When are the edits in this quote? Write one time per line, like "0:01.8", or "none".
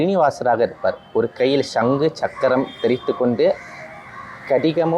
none